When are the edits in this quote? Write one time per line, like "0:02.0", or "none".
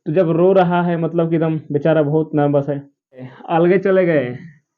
0:03.4